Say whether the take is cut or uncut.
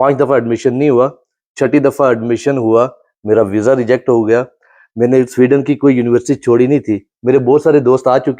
uncut